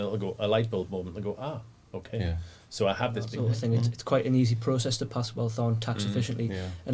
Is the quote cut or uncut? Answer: cut